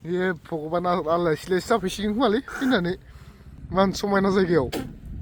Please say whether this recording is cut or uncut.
uncut